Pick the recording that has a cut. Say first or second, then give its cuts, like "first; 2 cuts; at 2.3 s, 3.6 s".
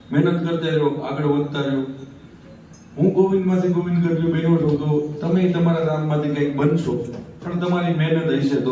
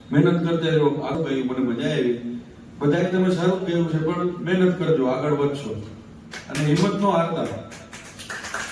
second; 1 cut; at 1.1 s